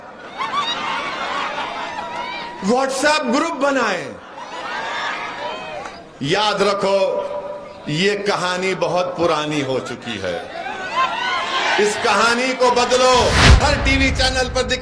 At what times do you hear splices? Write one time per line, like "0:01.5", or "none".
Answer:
0:13.6